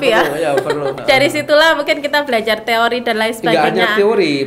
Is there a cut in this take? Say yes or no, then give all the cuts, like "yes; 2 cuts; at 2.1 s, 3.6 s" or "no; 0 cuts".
yes; 1 cut; at 0.9 s